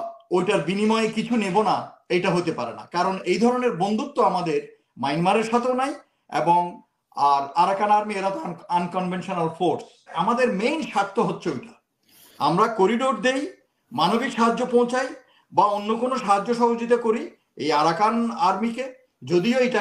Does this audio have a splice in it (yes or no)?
yes